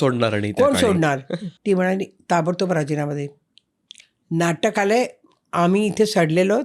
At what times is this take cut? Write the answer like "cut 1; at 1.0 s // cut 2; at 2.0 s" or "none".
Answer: cut 1; at 1.5 s